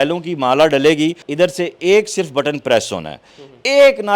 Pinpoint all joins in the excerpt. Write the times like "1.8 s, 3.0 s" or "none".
1.2 s